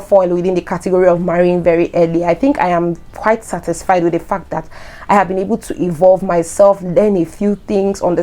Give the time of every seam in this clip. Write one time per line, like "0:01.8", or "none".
none